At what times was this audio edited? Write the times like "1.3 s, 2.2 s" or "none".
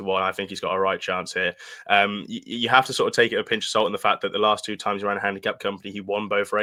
none